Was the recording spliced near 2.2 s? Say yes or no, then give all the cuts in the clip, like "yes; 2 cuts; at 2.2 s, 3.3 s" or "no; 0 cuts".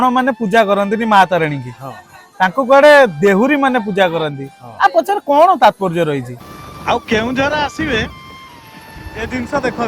no; 1 cut; at 6.3 s